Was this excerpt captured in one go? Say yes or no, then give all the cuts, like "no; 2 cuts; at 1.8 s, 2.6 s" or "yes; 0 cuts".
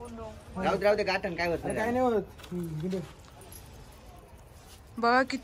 yes; 0 cuts